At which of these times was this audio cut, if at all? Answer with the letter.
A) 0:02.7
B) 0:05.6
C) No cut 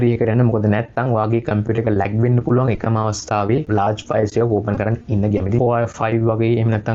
B